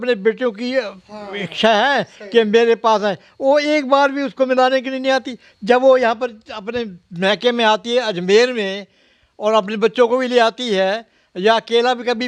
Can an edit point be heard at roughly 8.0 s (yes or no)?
no